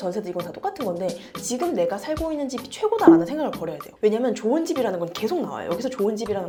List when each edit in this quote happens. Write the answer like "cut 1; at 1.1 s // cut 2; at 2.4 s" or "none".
none

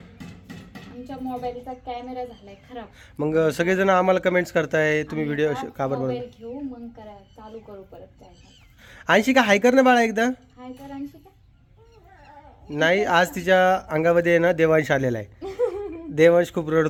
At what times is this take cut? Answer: none

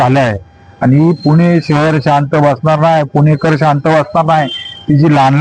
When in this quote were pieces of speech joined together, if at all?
none

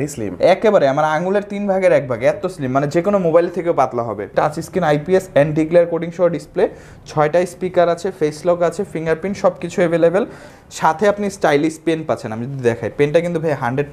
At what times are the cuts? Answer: cut 1; at 4.3 s // cut 2; at 10.4 s

